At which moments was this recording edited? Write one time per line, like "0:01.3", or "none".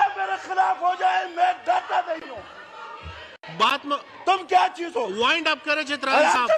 none

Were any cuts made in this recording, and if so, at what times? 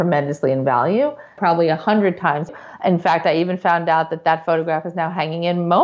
0:01.4
0:02.6

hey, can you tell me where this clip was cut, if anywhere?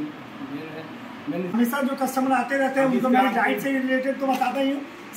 0:01.5

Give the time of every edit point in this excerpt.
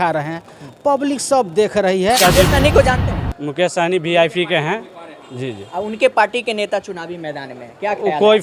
0:02.2

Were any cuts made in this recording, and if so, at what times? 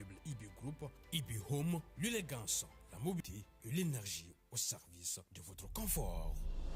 0:03.3

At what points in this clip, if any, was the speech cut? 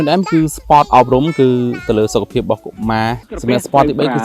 0:03.2

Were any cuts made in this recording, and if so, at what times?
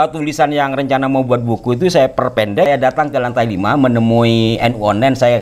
0:02.7

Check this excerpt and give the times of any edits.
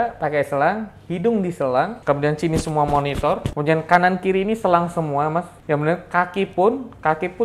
0:02.0
0:03.5
0:05.5

